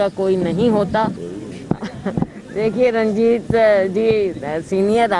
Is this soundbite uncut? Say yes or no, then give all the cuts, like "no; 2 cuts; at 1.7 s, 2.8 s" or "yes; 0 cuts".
no; 1 cut; at 1.3 s